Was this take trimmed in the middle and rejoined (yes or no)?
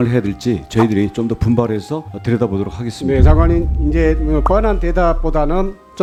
no